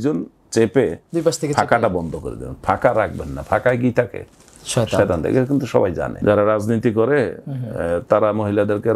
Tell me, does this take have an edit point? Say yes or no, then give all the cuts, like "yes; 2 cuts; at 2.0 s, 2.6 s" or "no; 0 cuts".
yes; 1 cut; at 6.1 s